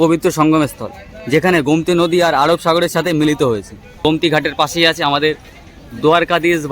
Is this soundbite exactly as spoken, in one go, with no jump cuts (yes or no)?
no